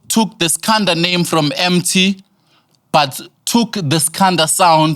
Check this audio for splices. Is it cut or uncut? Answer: uncut